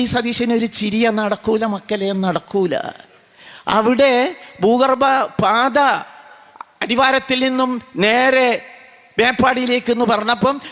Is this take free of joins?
yes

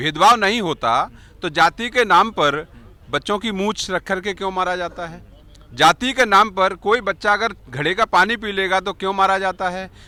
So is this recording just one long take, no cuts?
yes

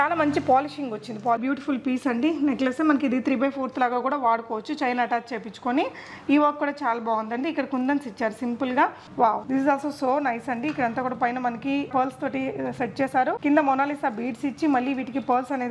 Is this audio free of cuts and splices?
no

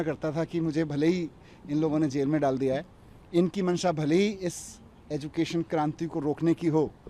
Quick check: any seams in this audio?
no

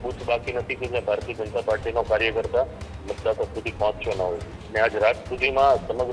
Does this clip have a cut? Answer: yes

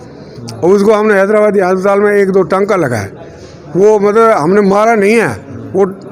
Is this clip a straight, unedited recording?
yes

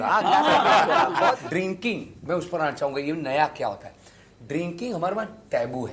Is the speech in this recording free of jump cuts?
no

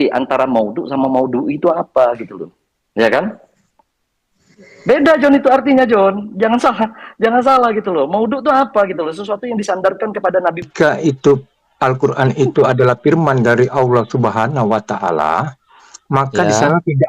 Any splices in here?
yes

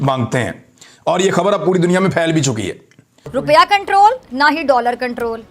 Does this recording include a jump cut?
yes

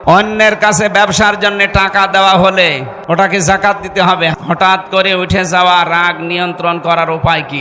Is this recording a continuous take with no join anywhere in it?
no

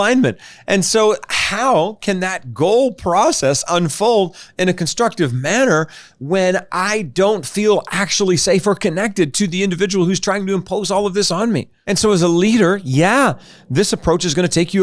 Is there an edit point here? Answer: yes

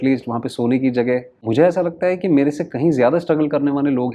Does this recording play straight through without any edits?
no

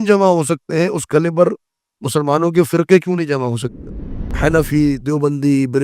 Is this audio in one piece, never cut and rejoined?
no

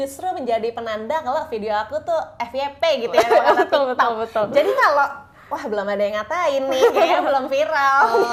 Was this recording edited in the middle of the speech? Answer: no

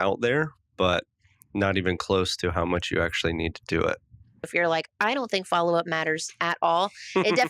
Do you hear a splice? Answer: yes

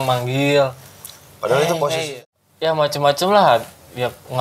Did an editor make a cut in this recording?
yes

